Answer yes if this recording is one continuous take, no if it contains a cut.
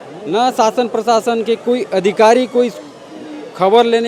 yes